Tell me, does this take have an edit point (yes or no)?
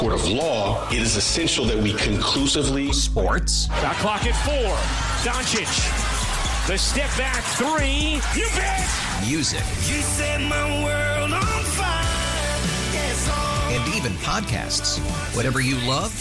no